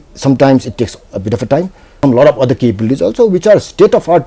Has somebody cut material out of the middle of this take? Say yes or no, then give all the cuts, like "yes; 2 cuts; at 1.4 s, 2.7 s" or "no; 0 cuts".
yes; 1 cut; at 2.0 s